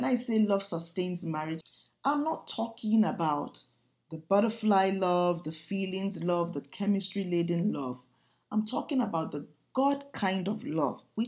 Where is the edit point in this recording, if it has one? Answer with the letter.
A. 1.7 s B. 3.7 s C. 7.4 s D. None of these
A